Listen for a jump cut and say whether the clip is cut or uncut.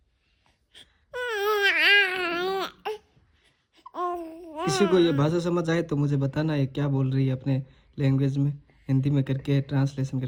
uncut